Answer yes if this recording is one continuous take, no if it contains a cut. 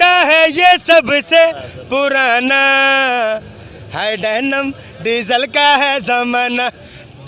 yes